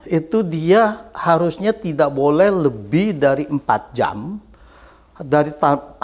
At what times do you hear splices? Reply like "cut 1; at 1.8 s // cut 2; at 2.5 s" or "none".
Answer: none